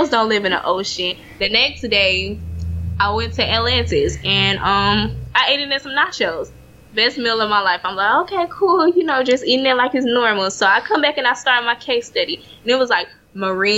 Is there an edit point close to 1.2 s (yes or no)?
yes